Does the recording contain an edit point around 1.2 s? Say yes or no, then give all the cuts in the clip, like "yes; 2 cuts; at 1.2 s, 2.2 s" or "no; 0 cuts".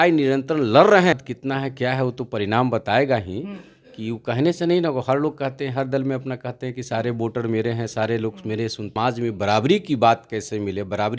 yes; 2 cuts; at 1.2 s, 8.9 s